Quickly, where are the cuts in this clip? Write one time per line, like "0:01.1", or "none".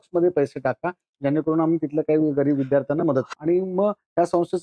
0:03.3